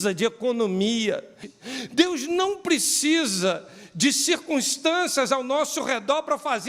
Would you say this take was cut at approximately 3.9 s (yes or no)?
no